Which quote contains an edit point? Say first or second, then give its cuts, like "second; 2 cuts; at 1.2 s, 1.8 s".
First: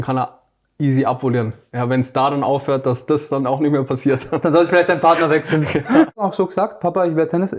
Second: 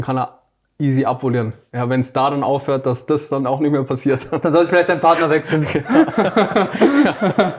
first; 1 cut; at 6.2 s